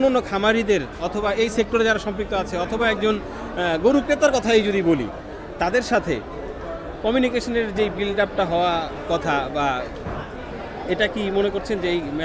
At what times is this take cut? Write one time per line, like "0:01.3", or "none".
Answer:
none

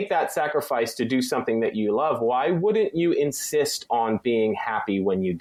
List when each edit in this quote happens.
none

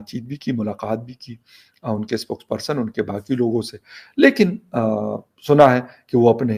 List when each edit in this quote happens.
none

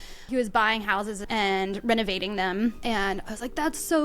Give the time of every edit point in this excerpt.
0:01.2
0:02.8

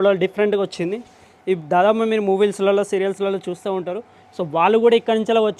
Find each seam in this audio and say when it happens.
none

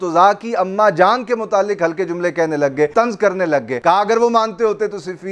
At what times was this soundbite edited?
0:02.9
0:03.7

